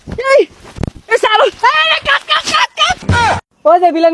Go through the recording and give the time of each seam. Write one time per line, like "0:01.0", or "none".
0:03.2